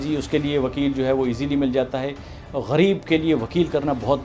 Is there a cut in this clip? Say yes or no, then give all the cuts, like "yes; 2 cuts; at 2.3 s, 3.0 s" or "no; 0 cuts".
no; 0 cuts